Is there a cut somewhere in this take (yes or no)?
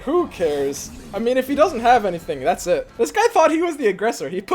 yes